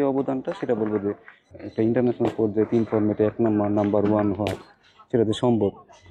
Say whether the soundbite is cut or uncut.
cut